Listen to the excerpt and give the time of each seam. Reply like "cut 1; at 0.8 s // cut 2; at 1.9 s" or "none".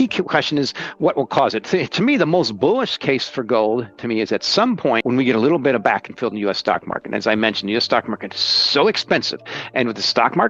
cut 1; at 5.0 s